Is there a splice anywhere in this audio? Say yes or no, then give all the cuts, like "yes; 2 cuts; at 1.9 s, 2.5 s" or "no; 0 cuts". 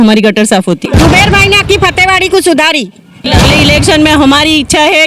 yes; 2 cuts; at 0.8 s, 3.3 s